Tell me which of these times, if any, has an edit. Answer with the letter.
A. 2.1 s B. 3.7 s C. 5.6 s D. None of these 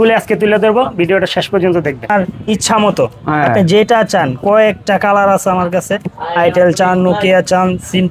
A